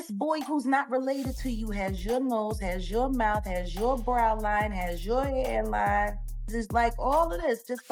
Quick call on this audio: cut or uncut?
cut